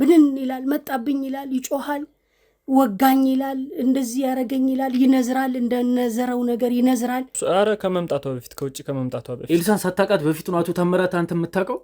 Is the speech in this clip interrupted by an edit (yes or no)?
yes